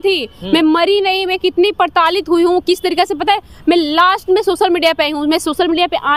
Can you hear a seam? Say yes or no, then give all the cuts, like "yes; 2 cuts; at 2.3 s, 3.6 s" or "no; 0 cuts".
no; 0 cuts